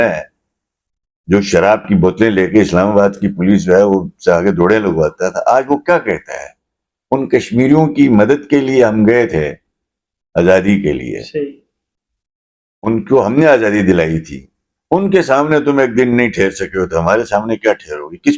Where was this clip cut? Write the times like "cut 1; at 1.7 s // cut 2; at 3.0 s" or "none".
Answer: none